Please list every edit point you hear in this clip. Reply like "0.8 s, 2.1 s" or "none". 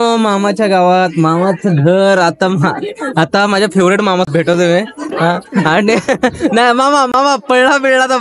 4.3 s